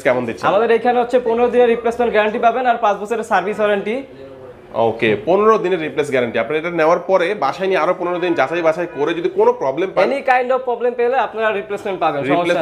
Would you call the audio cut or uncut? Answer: uncut